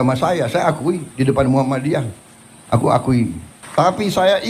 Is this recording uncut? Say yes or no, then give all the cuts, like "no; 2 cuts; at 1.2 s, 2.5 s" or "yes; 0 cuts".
no; 1 cut; at 3.5 s